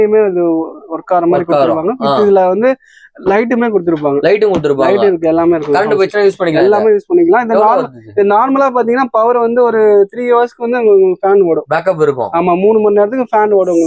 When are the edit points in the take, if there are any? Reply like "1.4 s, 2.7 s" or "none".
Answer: none